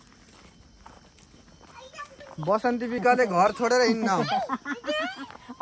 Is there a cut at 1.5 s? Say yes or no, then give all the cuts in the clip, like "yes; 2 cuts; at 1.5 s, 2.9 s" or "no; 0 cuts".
no; 1 cut; at 3.0 s